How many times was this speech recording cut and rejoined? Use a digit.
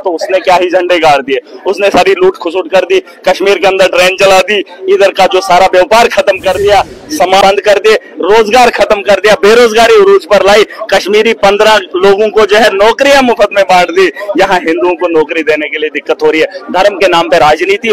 1